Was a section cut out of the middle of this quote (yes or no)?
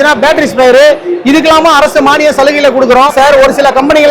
yes